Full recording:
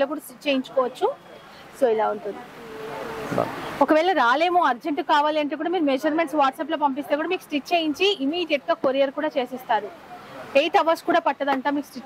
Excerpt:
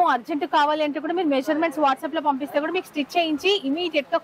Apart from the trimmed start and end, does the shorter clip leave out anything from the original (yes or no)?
no